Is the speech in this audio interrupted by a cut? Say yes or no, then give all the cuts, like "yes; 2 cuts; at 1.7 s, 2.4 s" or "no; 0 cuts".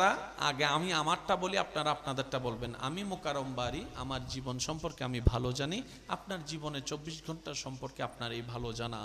no; 0 cuts